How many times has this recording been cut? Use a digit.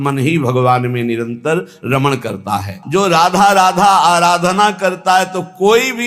1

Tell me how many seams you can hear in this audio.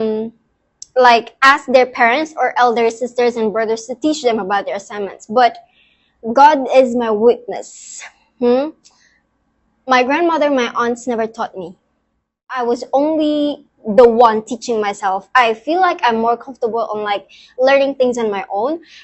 1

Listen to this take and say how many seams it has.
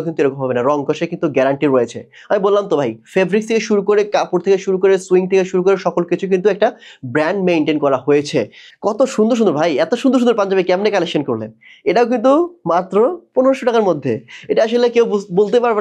1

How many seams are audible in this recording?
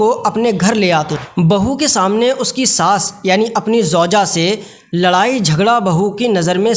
1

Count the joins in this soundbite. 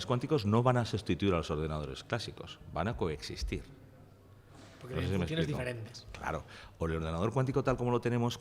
0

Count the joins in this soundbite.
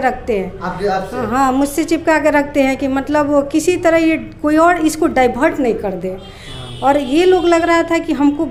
0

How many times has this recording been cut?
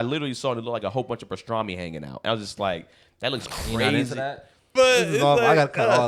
1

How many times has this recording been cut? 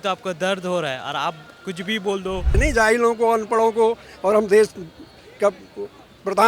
1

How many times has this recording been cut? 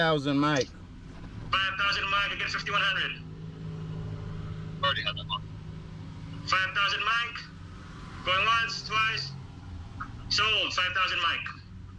0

